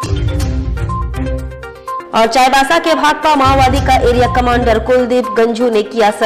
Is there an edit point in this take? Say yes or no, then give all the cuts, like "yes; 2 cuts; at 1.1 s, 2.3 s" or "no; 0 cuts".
no; 0 cuts